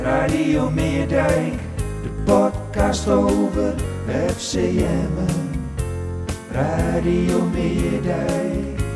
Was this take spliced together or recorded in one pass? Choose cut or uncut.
uncut